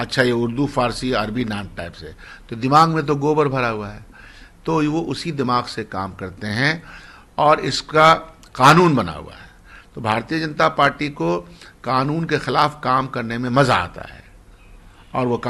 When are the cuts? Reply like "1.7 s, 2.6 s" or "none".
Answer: none